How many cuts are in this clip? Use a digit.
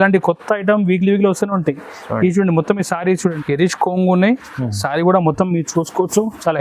1